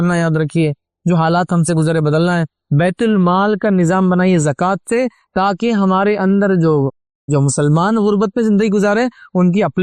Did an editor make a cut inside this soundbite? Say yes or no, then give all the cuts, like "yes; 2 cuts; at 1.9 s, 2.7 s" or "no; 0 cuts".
no; 0 cuts